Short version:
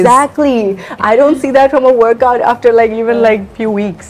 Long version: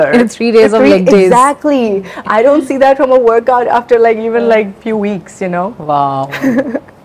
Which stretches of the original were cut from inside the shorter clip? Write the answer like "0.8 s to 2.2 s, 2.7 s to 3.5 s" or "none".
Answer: none